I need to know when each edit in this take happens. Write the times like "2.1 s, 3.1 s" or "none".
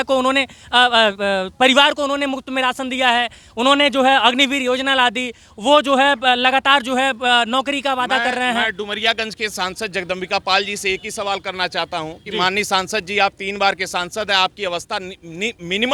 none